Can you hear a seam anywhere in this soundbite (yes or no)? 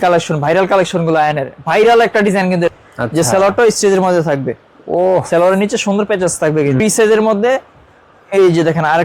yes